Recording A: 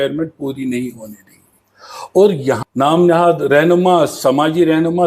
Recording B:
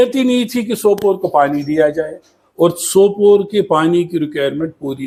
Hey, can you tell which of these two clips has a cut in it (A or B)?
A